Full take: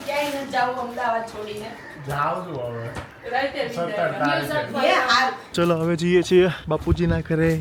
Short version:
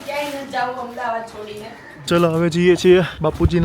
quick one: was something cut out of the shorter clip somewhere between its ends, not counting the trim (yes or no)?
yes